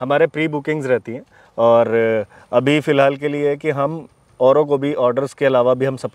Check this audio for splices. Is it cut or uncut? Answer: uncut